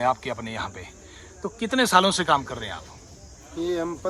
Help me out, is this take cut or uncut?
uncut